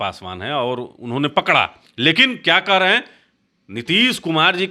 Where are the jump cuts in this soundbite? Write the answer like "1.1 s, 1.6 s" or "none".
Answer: 1.8 s